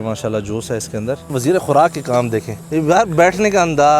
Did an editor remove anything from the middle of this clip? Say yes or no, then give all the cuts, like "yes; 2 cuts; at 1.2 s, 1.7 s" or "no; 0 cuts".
yes; 2 cuts; at 1.4 s, 2.6 s